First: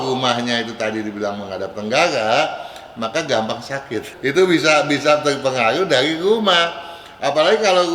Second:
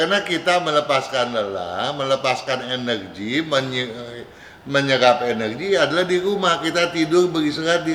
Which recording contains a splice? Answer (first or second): first